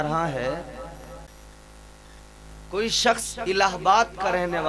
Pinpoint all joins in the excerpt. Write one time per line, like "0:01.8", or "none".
0:01.3